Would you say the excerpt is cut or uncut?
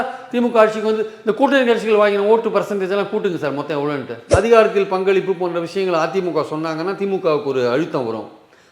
cut